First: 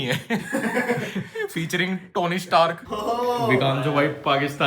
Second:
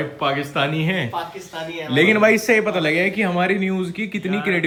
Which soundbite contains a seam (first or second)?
first